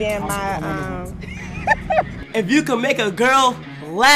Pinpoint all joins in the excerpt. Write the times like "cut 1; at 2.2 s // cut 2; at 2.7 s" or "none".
none